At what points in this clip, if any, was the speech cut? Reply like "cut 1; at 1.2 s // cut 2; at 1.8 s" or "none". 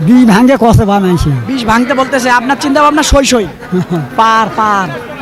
none